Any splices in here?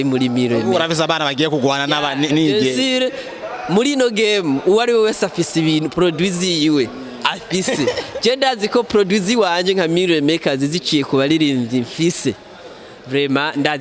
no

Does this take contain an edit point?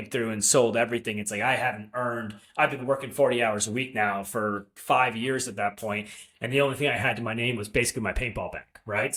no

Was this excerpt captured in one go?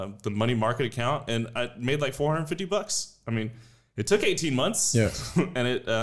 yes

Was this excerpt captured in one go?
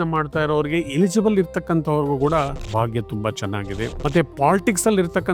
no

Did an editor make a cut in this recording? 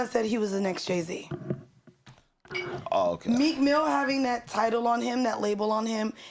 yes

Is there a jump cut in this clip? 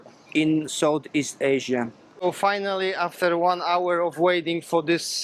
yes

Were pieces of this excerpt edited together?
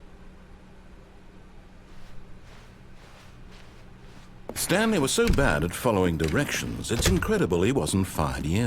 yes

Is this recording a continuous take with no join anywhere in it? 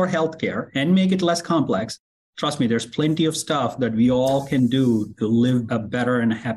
yes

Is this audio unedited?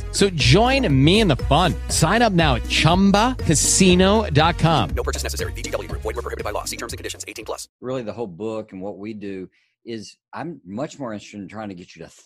no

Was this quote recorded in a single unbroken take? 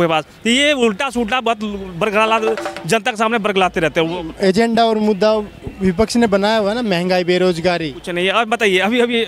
yes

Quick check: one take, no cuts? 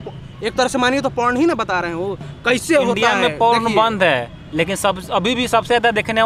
yes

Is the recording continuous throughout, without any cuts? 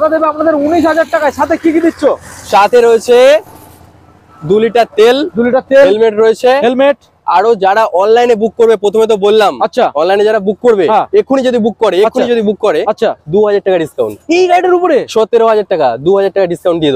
yes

